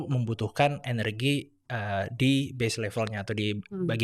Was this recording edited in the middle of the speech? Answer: no; 0 cuts

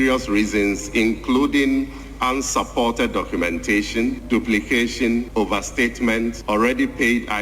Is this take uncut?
no; 3 cuts; at 4.2 s, 5.3 s, 6.4 s

